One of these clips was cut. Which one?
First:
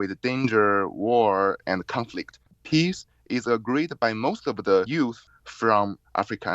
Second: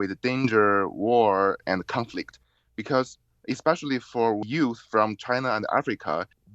first; 2 cuts; at 2.6 s, 5.2 s

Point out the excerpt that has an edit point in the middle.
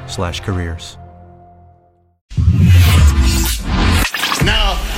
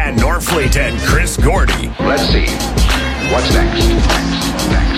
first; 1 cut; at 2.3 s

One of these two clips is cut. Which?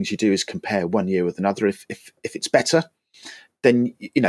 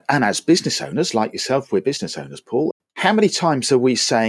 second; 1 cut; at 2.7 s

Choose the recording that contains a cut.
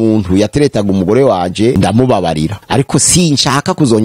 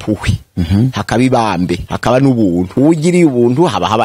second; 1 cut; at 2.7 s

